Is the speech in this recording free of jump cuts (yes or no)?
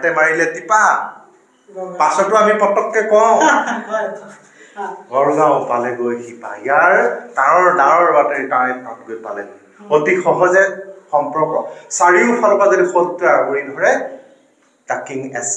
yes